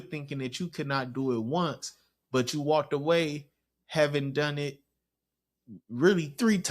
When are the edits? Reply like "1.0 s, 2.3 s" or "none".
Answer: none